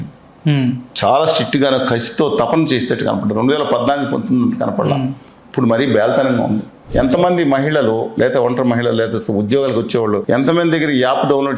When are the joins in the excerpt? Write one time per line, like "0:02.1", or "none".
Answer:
0:06.8
0:10.2